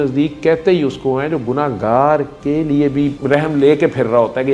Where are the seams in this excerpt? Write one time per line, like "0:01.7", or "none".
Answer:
none